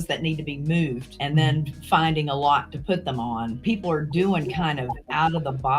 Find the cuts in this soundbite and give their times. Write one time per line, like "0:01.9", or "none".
0:01.1
0:03.6